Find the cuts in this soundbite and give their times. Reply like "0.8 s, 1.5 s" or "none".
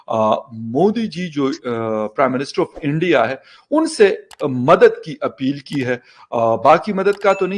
none